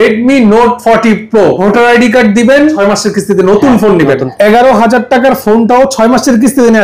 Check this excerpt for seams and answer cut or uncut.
cut